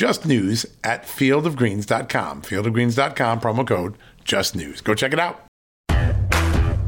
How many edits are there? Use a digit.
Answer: 1